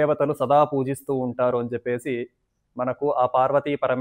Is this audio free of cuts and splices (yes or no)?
yes